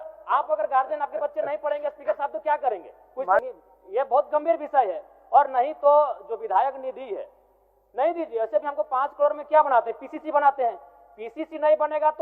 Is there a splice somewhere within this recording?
yes; 1 cut; at 3.4 s

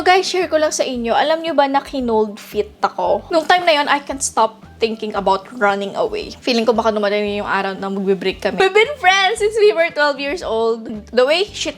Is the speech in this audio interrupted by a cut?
yes; 4 cuts; at 3.2 s, 6.3 s, 8.6 s, 10.9 s

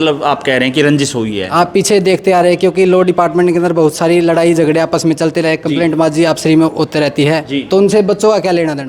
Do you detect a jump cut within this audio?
no; 0 cuts

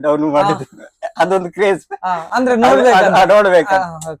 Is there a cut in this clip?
no; 0 cuts

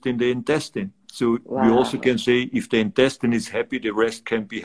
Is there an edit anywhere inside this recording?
no; 0 cuts

